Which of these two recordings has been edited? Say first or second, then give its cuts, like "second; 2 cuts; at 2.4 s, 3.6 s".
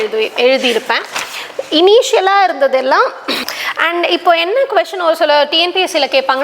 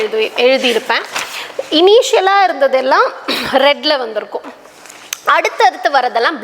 first; 1 cut; at 3.4 s